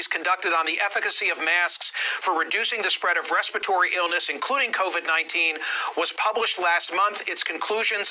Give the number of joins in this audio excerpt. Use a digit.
0